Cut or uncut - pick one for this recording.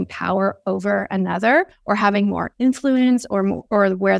uncut